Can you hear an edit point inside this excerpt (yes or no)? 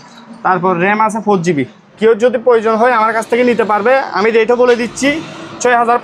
yes